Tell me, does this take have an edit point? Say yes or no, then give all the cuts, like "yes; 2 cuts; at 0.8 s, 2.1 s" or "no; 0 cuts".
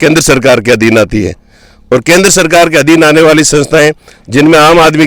no; 0 cuts